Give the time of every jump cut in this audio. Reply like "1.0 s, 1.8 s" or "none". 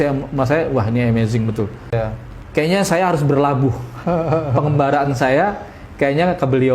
1.9 s